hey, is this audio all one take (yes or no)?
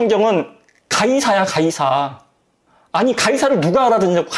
yes